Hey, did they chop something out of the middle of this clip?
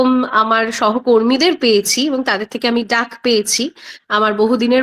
no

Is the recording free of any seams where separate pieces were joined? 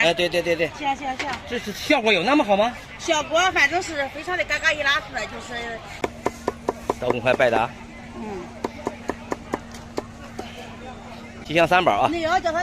no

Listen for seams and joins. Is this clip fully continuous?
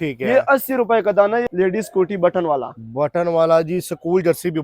no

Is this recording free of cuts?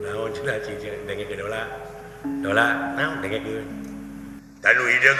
yes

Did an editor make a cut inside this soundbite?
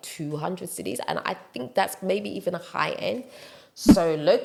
no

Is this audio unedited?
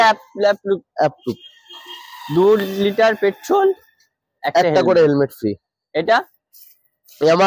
yes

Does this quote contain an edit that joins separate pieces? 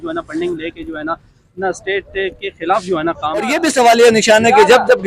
yes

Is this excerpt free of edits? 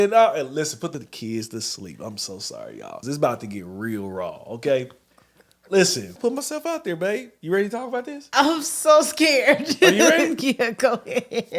no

